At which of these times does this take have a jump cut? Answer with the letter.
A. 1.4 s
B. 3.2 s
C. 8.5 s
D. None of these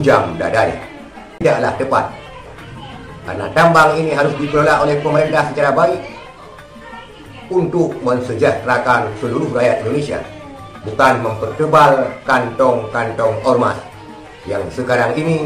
A